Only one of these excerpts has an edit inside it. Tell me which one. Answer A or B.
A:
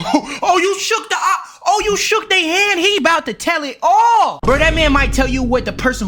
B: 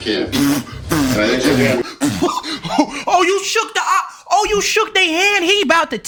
A